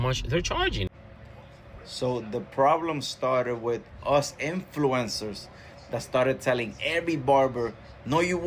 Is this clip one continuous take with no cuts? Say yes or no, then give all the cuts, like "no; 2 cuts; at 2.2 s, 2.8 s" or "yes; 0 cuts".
no; 1 cut; at 0.9 s